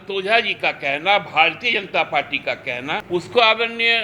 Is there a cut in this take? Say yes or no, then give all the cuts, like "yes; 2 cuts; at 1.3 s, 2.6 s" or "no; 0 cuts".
yes; 1 cut; at 3.0 s